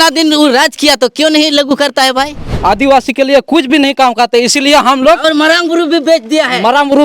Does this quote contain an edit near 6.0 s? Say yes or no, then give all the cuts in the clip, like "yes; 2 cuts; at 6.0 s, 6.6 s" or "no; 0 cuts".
no; 1 cut; at 2.4 s